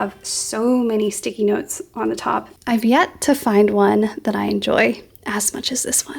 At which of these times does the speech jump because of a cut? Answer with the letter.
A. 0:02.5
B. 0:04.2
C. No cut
A